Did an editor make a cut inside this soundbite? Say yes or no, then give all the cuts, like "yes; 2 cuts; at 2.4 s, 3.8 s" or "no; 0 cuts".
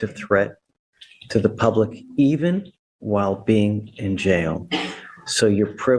no; 0 cuts